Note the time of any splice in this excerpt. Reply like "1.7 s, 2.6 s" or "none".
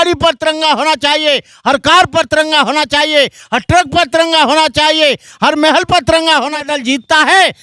6.7 s